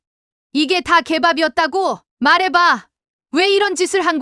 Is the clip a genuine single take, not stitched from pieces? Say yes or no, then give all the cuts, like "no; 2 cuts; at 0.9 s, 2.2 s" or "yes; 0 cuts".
no; 1 cut; at 2.1 s